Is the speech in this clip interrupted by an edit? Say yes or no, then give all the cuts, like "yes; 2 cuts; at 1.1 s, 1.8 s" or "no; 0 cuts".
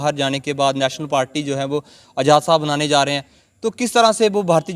no; 0 cuts